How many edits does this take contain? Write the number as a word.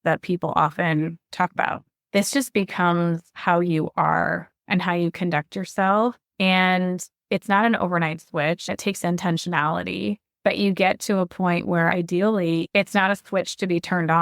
one